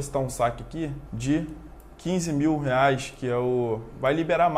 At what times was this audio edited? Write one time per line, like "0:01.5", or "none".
0:01.1